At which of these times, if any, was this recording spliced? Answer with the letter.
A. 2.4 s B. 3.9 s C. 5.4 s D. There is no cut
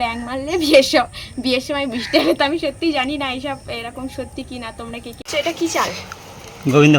C